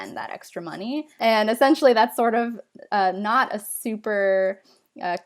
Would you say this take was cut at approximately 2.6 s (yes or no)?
no